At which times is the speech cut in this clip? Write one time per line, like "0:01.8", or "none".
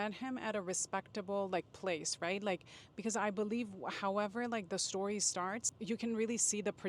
0:05.7